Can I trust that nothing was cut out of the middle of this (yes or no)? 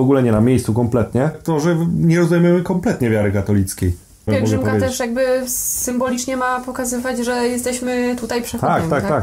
no